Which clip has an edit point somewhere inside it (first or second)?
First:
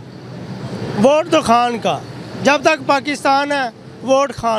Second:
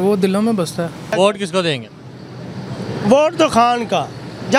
second